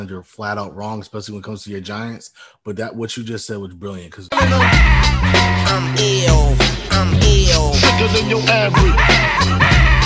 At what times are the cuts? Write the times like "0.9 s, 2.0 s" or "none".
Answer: 4.2 s